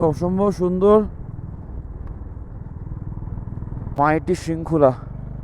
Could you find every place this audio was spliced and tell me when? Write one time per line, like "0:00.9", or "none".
0:04.0